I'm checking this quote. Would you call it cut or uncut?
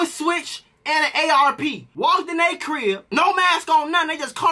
cut